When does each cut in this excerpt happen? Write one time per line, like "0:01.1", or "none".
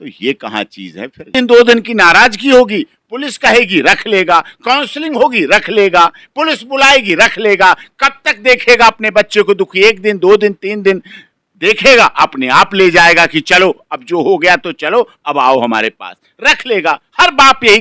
0:01.3